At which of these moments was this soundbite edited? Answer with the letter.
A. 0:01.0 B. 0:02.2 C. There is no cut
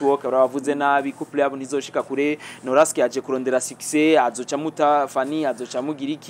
C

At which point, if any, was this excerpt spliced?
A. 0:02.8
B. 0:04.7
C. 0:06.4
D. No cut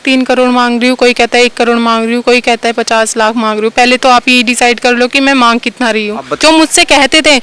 C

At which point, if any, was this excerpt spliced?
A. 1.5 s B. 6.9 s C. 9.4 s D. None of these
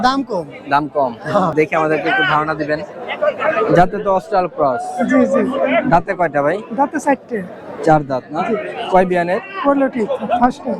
A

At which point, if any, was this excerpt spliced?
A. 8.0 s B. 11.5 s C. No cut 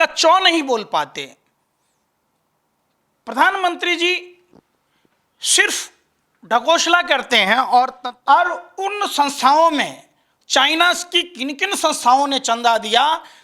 A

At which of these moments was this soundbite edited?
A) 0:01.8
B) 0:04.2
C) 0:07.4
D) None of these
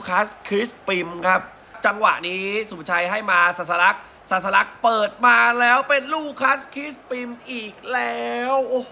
A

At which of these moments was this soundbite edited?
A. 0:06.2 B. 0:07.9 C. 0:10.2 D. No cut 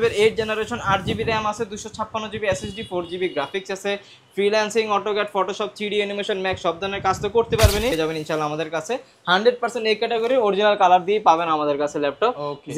B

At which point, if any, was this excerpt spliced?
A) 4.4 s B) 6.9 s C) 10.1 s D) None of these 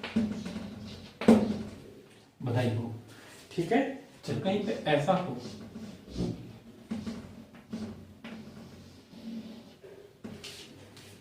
A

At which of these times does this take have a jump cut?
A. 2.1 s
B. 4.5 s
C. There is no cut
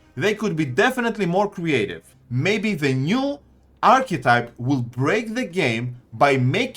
A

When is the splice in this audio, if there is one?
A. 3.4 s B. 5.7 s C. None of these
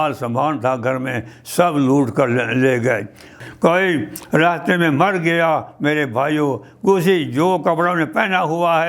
A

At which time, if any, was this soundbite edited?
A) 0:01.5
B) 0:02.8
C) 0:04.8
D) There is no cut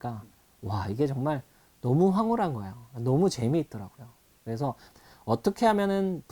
C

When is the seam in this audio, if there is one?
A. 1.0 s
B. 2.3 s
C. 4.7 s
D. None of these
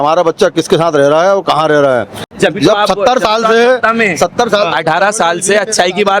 B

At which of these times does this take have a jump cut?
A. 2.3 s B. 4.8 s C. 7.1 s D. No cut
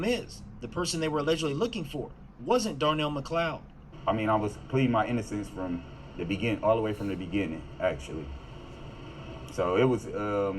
C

